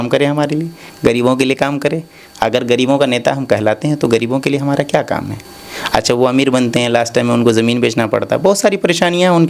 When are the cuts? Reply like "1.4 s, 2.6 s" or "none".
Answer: none